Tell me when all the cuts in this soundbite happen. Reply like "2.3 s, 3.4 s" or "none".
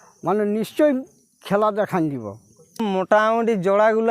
2.8 s